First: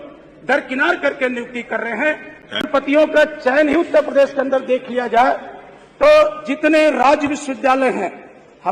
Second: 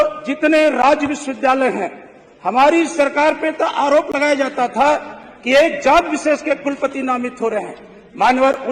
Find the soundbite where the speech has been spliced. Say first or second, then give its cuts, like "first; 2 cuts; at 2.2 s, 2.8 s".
first; 1 cut; at 2.6 s